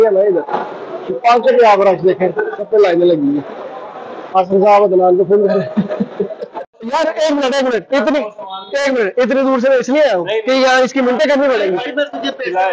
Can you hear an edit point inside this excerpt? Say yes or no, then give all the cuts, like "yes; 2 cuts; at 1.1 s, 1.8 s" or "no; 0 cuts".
yes; 1 cut; at 6.8 s